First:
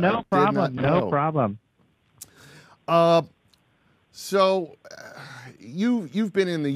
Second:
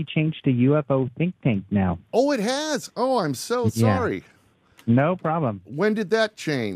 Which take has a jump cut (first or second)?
first